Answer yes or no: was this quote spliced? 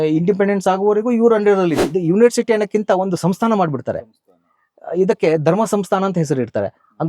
yes